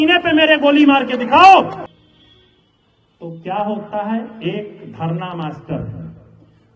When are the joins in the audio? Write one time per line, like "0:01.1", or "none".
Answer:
0:01.9